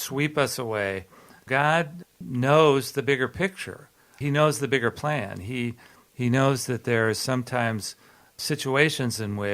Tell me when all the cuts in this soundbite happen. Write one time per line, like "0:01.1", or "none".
0:01.5
0:02.1
0:04.0
0:08.3

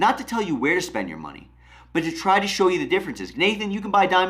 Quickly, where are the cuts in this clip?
0:03.2

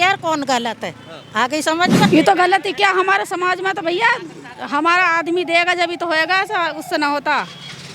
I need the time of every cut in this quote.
0:02.1

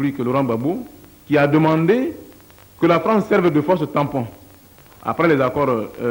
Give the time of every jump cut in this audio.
none

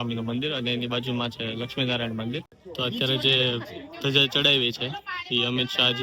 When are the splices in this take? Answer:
0:02.5

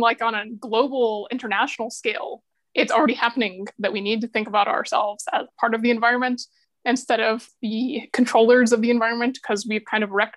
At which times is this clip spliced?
0:07.5

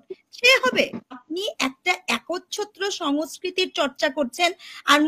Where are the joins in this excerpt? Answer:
0:01.2

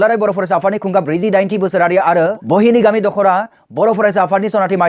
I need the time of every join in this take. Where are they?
0:02.4

